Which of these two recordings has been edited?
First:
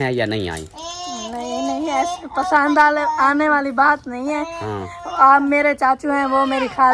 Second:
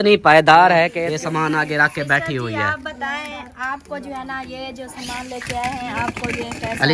second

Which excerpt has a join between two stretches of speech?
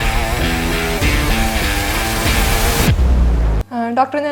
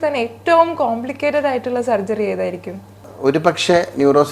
second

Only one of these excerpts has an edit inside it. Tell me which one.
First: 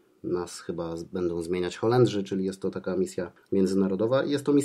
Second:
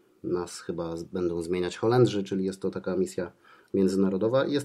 first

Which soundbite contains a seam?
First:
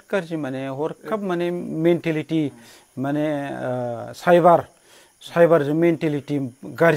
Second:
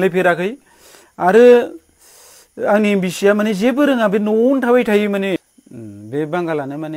second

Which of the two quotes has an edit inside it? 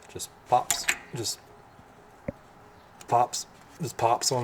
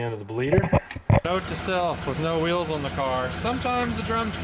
second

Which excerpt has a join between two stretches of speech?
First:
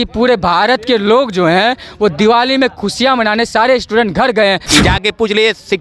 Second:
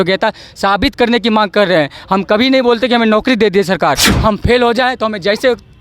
first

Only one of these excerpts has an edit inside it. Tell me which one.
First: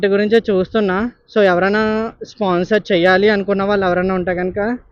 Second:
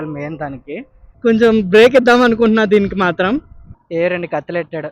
second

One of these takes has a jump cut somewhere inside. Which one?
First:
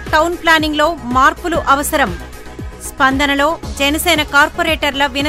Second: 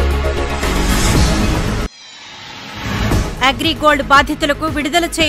second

